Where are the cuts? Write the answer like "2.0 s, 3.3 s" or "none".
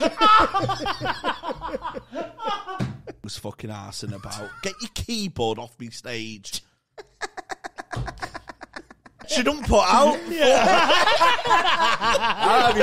3.2 s, 9.3 s